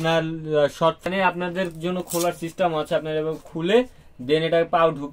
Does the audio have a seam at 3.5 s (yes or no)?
no